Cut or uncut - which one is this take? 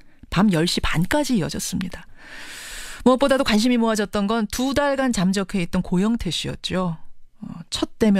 cut